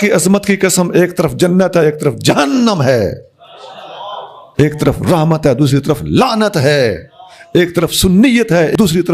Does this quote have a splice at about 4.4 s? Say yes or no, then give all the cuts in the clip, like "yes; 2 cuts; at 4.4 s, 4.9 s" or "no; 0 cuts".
yes; 1 cut; at 4.4 s